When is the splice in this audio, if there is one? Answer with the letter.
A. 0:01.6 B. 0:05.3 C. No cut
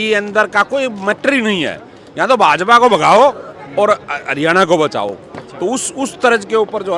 C